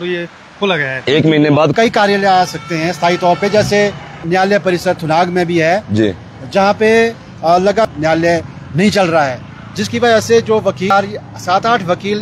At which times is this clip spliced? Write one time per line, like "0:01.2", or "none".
0:01.7
0:04.2
0:07.9
0:10.9